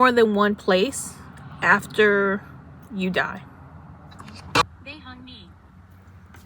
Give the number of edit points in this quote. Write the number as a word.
one